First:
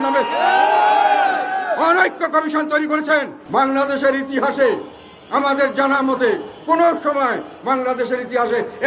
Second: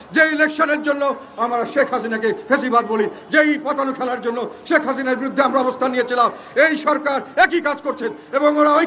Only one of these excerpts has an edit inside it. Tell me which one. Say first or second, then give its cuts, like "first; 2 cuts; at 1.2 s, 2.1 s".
first; 1 cut; at 3.4 s